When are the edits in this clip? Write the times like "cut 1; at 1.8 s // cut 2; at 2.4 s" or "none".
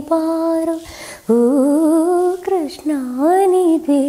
none